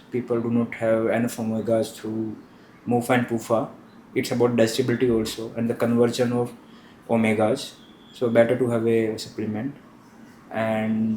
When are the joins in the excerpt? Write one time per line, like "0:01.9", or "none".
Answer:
none